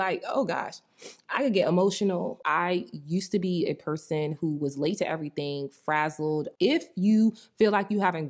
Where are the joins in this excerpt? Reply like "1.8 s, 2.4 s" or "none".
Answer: 2.4 s, 6.5 s